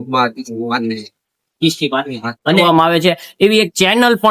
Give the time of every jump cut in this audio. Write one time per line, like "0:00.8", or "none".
0:02.6